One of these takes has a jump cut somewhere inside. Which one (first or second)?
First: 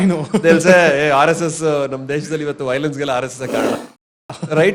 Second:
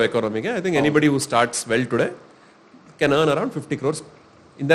first